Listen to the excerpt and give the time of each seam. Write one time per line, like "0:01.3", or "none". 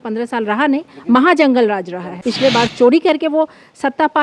0:02.2